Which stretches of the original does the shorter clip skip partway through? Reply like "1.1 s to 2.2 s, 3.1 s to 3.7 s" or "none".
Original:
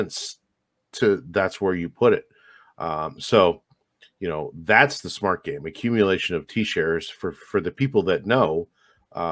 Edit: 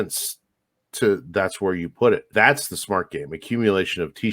2.3 s to 4.6 s